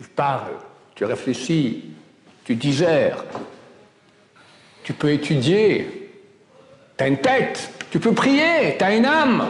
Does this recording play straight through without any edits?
yes; 0 cuts

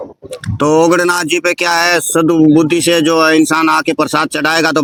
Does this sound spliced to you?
no; 0 cuts

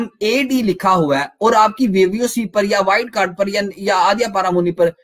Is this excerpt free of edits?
yes; 0 cuts

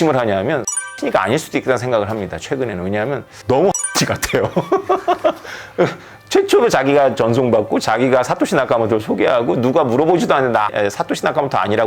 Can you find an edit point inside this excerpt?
yes; 2 cuts; at 0.9 s, 10.7 s

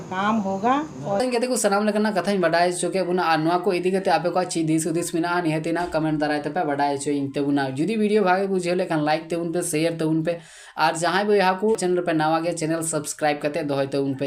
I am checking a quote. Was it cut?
no; 0 cuts

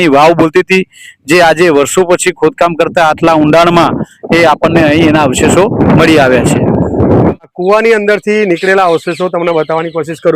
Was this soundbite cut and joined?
yes; 1 cut; at 7.4 s

